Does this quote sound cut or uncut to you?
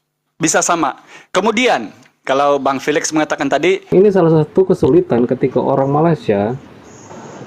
cut